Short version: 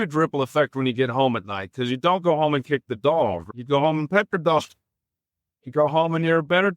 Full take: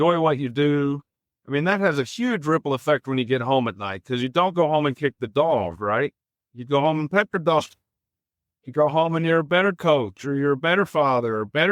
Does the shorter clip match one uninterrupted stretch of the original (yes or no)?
no